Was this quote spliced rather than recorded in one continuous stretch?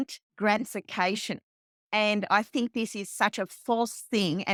no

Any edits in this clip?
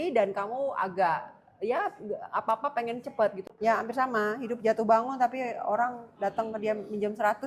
yes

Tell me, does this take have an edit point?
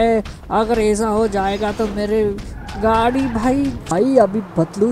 yes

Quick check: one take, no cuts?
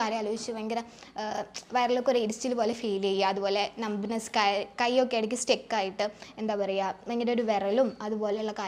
yes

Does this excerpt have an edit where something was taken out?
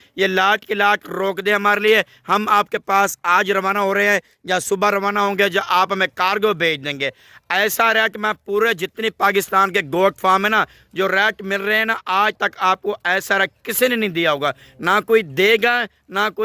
no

